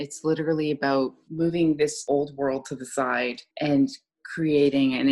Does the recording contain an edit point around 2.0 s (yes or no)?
yes